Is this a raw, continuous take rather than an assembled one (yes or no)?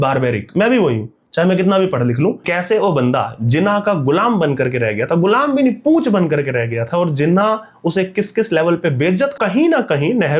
no